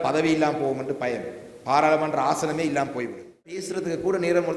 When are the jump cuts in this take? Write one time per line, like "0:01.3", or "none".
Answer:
0:03.7